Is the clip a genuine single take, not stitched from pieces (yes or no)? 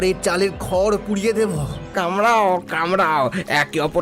no